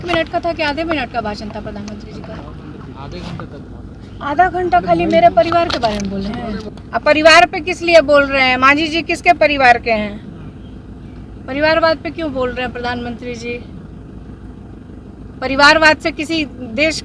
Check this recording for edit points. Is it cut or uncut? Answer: cut